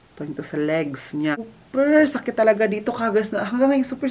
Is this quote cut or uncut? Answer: cut